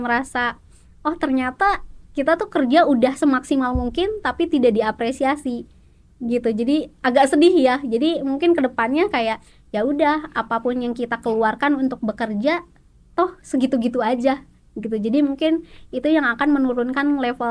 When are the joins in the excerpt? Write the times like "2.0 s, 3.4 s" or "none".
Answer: none

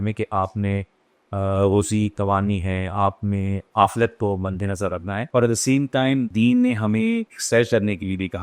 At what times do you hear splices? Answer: 5.2 s, 6.3 s, 7.3 s

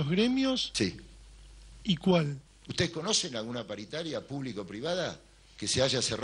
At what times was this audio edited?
none

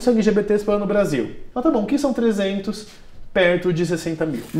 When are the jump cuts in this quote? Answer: 1.4 s

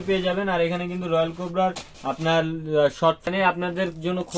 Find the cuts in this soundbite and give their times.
3.2 s

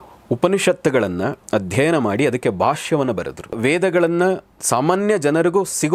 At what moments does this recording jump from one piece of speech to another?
3.6 s, 4.5 s

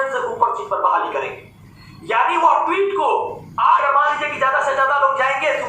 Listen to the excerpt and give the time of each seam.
3.8 s

